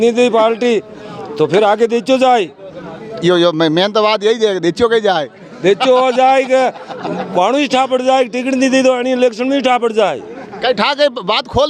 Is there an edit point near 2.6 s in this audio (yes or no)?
no